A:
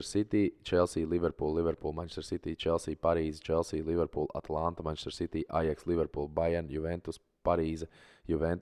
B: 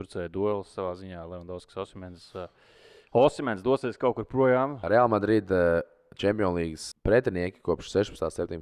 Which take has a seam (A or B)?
B